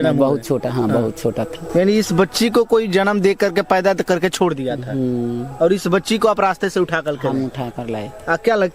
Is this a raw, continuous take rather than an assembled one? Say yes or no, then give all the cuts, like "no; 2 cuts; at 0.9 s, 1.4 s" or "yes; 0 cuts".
no; 1 cut; at 1.6 s